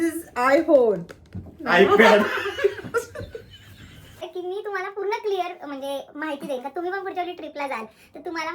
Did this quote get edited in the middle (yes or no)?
yes